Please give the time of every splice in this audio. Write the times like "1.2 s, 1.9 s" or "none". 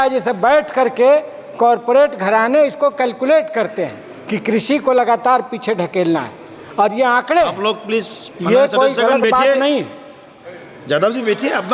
none